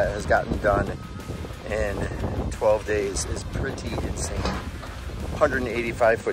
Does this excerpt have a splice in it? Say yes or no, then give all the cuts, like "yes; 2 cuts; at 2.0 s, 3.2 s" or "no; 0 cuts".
no; 0 cuts